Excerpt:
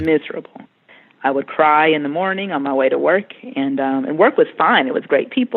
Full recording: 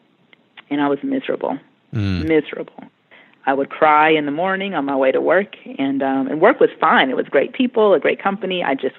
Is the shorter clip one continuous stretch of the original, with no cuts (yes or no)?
yes